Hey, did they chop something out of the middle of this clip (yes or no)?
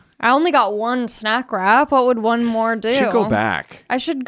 no